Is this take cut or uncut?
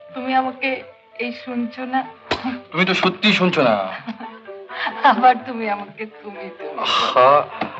uncut